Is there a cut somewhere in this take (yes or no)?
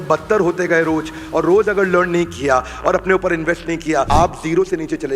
yes